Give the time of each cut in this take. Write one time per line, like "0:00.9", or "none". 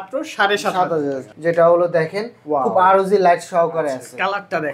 0:01.3